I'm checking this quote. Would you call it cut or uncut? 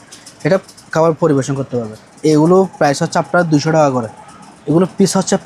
cut